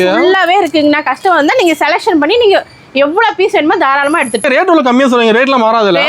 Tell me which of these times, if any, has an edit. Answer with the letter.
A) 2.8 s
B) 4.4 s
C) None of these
B